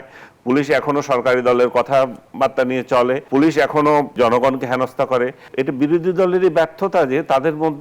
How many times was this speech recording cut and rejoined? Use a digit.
3